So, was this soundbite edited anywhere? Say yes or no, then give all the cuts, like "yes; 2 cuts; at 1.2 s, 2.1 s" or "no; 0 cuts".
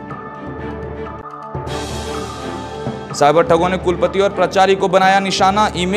yes; 1 cut; at 3.0 s